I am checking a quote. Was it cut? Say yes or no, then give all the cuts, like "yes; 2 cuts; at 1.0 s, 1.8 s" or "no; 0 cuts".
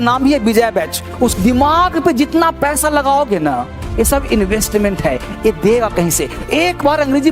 yes; 1 cut; at 1.3 s